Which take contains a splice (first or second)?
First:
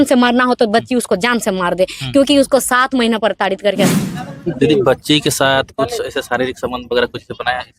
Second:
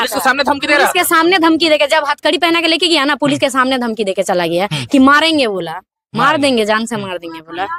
first